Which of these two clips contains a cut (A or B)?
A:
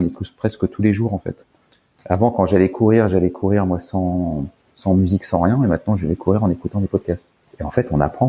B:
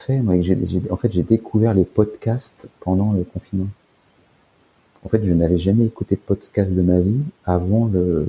A